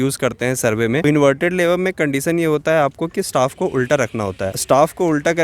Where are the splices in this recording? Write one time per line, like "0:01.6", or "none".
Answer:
0:04.5